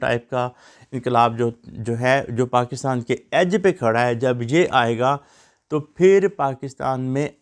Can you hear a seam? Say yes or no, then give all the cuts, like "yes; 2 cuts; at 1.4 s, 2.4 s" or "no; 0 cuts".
no; 0 cuts